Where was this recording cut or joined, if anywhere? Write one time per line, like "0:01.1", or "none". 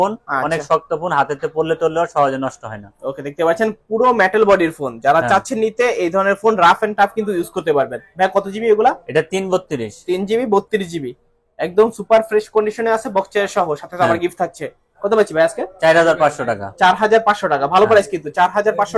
none